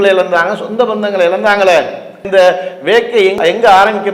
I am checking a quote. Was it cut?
no; 0 cuts

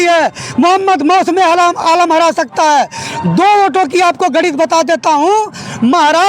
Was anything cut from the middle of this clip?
no; 0 cuts

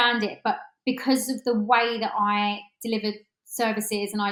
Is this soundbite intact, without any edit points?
yes; 0 cuts

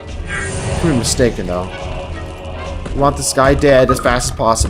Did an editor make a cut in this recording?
yes; 1 cut; at 3.6 s

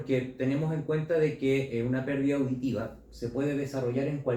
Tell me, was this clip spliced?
no; 0 cuts

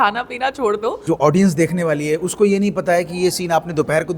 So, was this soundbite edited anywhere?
yes; 1 cut; at 1.0 s

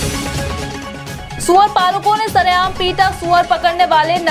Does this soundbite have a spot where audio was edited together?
no; 0 cuts

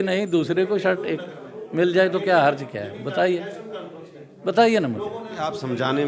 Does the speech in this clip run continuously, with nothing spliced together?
yes; 0 cuts

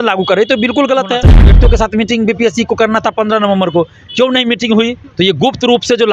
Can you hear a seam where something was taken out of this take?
yes; 2 cuts; at 1.6 s, 5.0 s

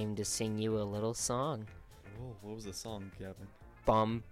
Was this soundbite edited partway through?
no; 0 cuts

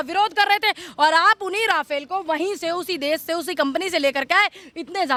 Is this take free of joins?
yes; 0 cuts

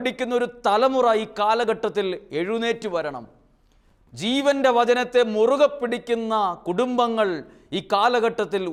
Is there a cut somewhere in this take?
no; 0 cuts

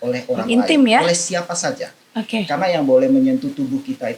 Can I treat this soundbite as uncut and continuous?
yes; 0 cuts

